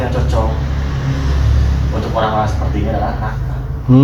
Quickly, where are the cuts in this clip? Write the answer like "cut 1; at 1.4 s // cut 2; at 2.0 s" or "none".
none